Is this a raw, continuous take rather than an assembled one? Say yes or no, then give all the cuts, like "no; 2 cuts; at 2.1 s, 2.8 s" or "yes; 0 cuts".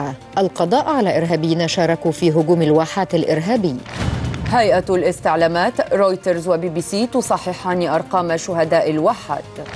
no; 1 cut; at 4.9 s